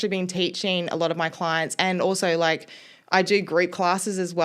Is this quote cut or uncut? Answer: uncut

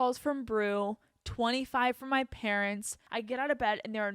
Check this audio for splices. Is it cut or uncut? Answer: cut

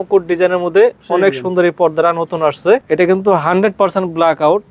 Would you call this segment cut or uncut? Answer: cut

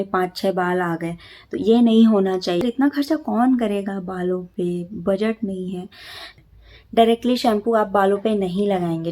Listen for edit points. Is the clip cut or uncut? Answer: cut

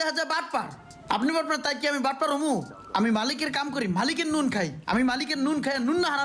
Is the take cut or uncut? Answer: uncut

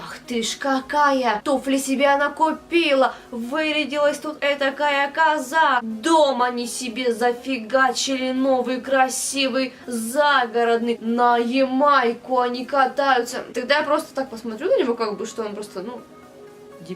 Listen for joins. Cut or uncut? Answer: cut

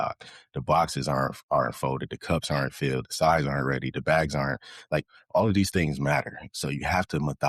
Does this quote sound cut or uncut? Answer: uncut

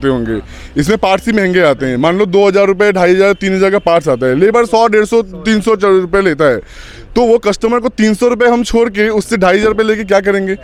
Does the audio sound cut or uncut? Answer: uncut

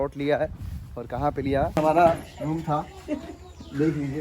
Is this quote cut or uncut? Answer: cut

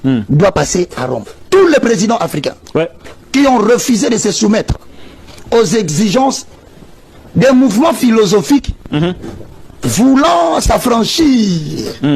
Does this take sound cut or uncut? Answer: cut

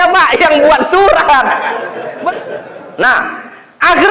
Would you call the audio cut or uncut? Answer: cut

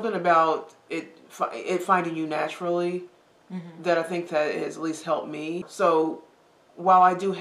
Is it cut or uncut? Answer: cut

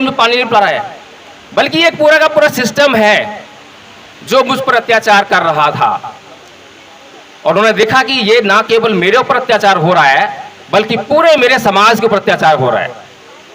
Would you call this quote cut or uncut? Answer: uncut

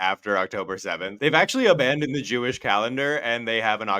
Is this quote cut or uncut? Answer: cut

